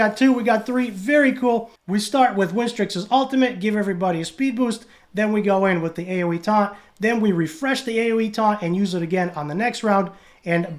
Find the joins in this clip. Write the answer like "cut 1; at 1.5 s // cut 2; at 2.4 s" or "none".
cut 1; at 1.8 s